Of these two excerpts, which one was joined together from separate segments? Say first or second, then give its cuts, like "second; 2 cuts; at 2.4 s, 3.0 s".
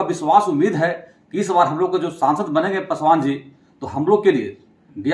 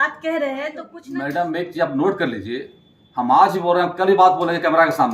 second; 1 cut; at 0.9 s